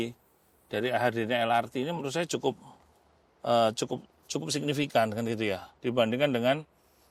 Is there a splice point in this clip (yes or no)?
no